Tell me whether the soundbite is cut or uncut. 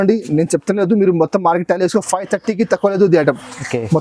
uncut